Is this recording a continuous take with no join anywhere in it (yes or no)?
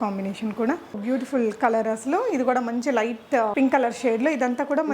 no